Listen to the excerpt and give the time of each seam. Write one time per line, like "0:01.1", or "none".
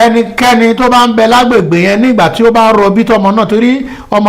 none